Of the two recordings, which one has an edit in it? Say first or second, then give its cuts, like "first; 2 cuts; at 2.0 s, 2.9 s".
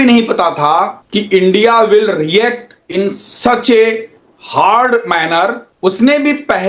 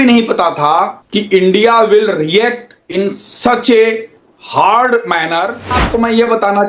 second; 1 cut; at 5.8 s